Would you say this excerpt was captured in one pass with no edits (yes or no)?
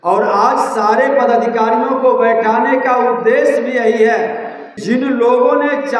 no